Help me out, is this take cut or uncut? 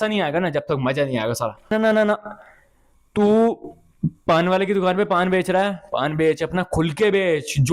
cut